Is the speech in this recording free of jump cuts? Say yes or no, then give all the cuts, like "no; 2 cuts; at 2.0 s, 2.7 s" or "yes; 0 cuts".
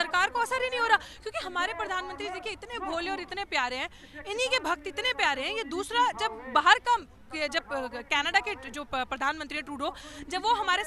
yes; 0 cuts